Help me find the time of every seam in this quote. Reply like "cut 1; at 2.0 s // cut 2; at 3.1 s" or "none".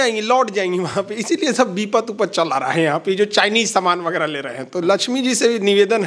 none